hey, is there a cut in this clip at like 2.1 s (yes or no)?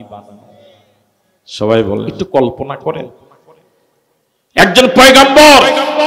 yes